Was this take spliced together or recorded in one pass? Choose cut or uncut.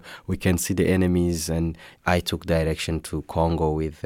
cut